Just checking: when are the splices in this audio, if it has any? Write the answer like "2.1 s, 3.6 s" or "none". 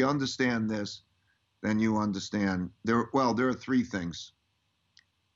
none